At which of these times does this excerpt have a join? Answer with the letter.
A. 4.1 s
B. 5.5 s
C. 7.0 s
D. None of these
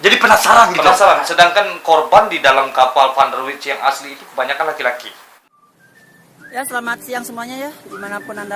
B